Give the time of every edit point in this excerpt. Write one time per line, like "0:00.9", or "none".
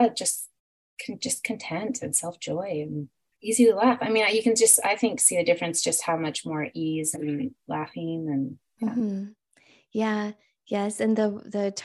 0:03.2